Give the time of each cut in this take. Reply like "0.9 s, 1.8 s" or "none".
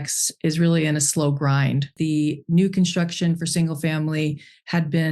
1.9 s